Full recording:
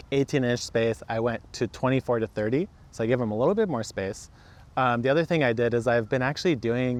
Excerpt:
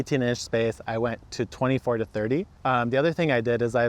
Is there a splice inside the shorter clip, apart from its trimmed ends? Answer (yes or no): yes